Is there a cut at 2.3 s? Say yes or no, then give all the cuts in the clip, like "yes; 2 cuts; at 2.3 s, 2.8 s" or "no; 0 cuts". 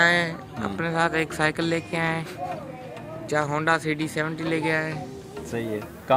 no; 0 cuts